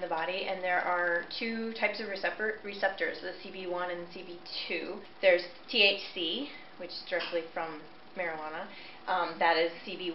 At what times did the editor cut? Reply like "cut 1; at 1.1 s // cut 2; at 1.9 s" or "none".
cut 1; at 5.1 s